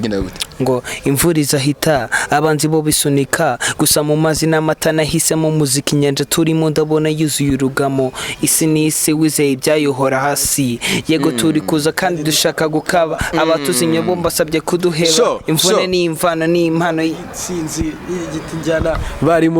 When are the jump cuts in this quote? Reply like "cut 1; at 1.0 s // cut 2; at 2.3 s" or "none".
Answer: none